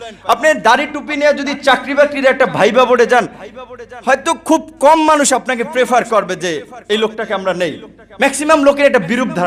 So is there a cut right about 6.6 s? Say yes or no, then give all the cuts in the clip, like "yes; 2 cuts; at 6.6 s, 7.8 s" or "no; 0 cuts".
no; 0 cuts